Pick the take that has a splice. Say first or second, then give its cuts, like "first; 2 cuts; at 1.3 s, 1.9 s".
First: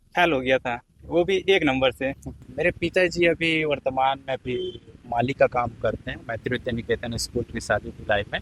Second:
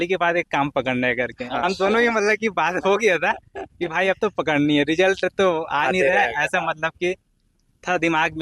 first; 1 cut; at 2.3 s